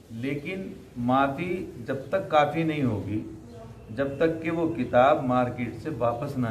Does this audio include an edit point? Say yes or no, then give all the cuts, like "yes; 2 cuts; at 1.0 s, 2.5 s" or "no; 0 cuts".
no; 0 cuts